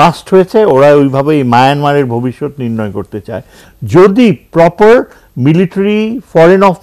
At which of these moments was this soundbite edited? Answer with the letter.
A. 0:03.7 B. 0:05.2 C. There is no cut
A